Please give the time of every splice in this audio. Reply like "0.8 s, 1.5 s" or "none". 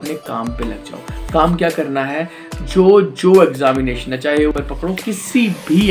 4.5 s